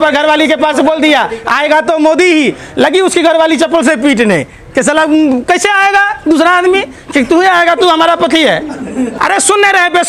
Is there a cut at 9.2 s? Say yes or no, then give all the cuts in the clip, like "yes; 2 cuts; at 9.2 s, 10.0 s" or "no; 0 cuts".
yes; 1 cut; at 9.2 s